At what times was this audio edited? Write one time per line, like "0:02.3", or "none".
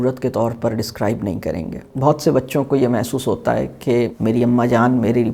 0:01.9
0:04.1